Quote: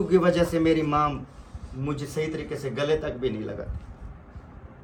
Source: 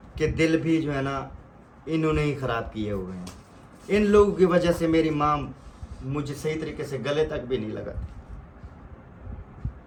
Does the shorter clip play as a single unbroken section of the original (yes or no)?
yes